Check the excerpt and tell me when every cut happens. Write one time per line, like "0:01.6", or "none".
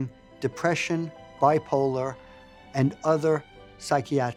none